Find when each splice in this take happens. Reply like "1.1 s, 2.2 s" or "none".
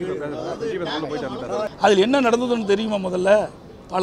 1.7 s